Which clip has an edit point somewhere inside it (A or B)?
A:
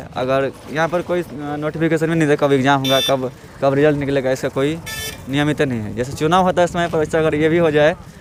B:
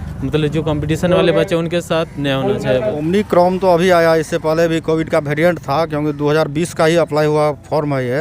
B